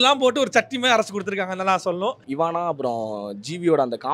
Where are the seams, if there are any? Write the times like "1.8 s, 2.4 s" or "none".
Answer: 2.2 s

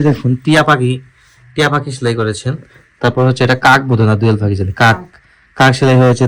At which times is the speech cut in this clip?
none

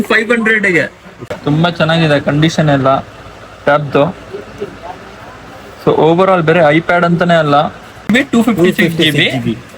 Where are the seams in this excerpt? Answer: 1.2 s, 8.1 s

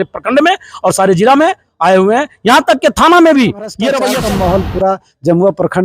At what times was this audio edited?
4.1 s

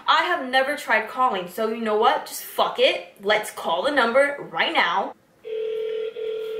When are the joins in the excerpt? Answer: 5.2 s

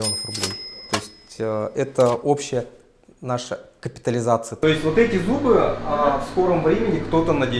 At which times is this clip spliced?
4.6 s

